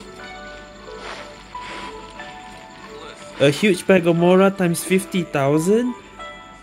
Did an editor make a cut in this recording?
no; 0 cuts

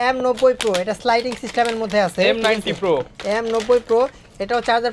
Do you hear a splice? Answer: no; 0 cuts

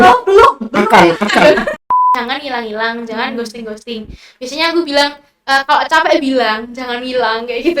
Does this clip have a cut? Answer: yes; 1 cut; at 2.0 s

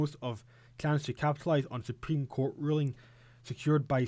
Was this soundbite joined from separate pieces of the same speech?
no; 0 cuts

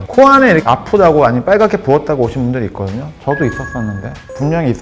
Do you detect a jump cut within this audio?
yes; 1 cut; at 3.1 s

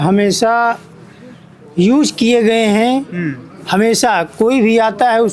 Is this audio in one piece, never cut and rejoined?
yes; 0 cuts

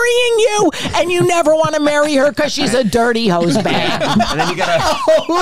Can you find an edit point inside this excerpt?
no; 0 cuts

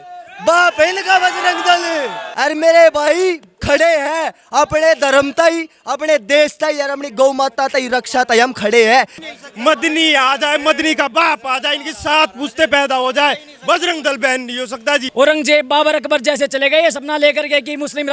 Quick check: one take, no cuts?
no; 3 cuts; at 2.2 s, 9.3 s, 15.1 s

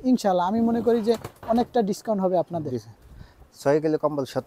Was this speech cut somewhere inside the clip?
no; 0 cuts

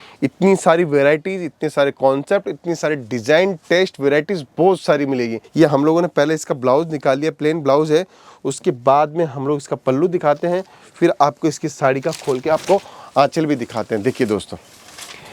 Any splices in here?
yes; 1 cut; at 5.4 s

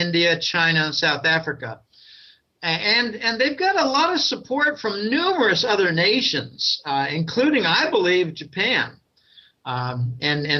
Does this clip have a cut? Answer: yes; 1 cut; at 5.1 s

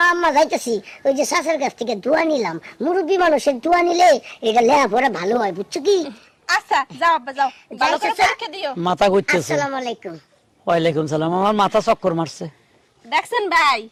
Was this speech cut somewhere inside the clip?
no; 0 cuts

